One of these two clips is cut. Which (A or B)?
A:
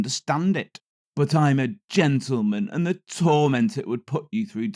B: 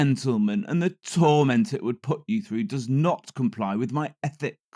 A